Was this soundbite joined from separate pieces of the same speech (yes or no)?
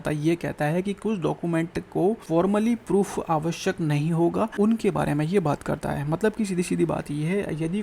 yes